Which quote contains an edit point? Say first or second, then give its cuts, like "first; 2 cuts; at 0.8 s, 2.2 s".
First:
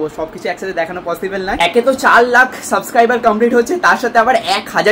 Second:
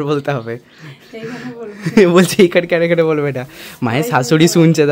first; 1 cut; at 1.6 s